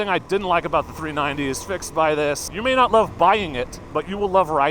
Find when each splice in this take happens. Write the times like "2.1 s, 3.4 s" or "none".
2.5 s, 3.8 s